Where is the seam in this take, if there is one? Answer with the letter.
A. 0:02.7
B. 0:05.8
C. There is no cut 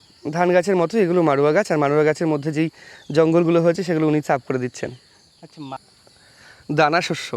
B